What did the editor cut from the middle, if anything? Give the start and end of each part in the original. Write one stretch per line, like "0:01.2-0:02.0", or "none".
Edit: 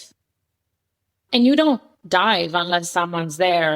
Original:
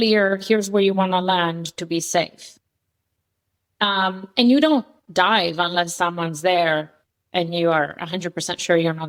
0:03.7-0:04.2

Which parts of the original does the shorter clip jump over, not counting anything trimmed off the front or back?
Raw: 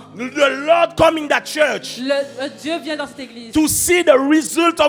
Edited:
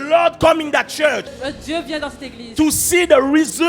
0:01.9-0:02.3

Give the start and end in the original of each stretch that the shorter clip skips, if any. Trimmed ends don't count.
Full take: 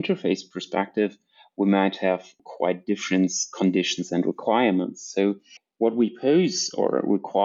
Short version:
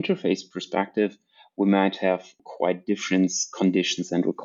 none

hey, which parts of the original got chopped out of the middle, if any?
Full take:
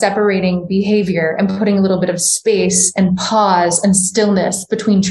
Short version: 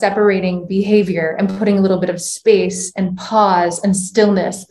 none

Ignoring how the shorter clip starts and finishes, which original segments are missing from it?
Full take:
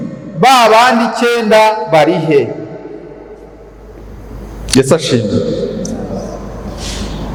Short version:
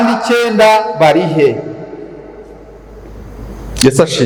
none

